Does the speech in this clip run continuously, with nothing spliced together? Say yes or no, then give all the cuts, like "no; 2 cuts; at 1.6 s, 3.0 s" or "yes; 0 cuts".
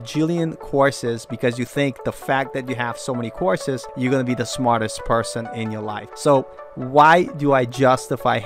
no; 2 cuts; at 3.9 s, 6.0 s